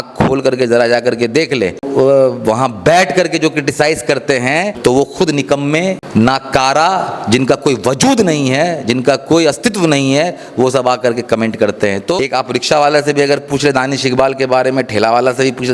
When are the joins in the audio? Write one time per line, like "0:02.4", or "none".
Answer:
0:01.9
0:04.7
0:06.0
0:12.1

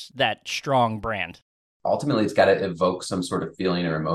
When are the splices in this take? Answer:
0:01.7

